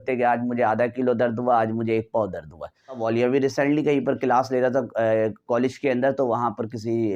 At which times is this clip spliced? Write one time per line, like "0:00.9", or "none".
0:03.0

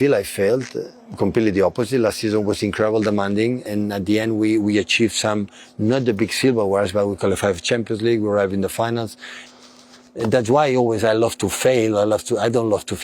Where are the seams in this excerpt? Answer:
0:03.7
0:09.4

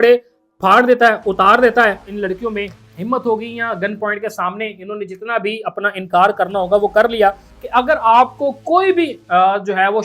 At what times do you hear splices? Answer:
0:02.1
0:07.5

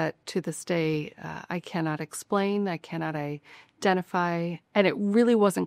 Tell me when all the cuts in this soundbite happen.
0:04.6

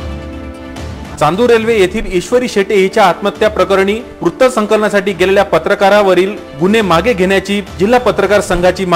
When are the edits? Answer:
none

